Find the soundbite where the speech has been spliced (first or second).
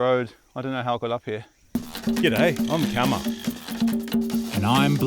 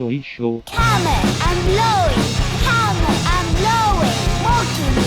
first